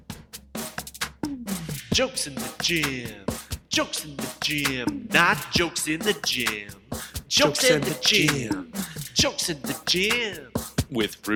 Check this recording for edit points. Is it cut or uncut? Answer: uncut